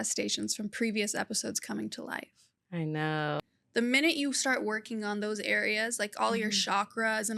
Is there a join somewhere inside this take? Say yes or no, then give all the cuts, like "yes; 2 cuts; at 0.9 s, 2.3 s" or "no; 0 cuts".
yes; 1 cut; at 3.4 s